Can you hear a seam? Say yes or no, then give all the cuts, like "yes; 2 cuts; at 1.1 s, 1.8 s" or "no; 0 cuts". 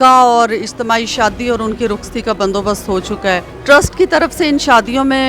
yes; 1 cut; at 3.5 s